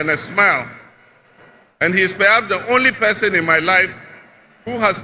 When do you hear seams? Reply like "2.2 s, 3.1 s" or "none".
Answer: none